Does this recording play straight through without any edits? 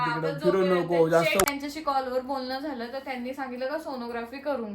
no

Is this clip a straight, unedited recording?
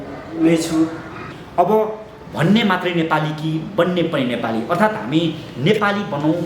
no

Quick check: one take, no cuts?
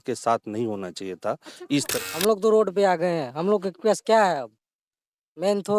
no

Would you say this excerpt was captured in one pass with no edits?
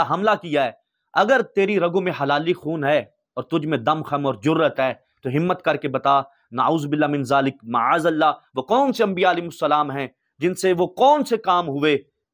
yes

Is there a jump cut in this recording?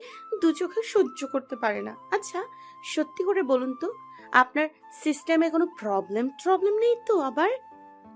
no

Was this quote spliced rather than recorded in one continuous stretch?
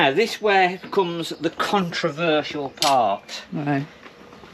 no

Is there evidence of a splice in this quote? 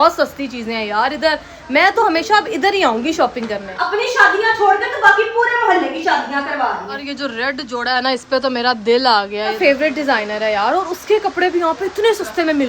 yes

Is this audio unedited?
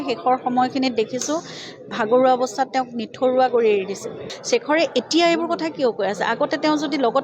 no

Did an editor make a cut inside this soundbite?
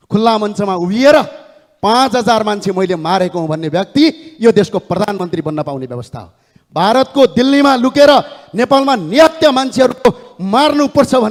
no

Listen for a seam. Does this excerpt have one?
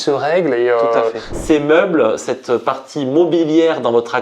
yes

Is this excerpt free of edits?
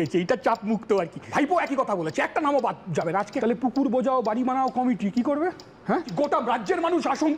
no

